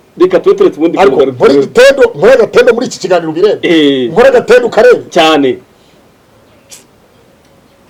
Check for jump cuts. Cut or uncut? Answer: uncut